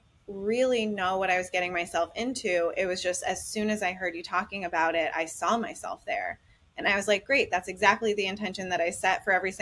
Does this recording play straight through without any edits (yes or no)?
yes